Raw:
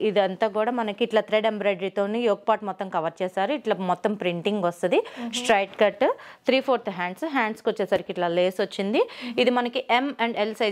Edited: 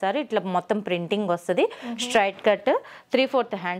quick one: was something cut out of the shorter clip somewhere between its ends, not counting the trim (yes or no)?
no